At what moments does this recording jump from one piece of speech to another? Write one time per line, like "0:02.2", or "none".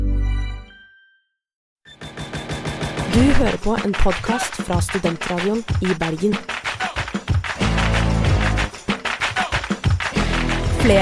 0:01.7